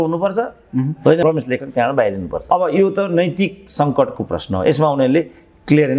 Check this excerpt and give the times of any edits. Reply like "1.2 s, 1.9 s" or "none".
2.3 s